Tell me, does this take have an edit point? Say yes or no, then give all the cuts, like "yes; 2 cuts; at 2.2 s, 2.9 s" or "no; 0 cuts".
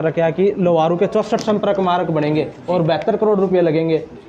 no; 0 cuts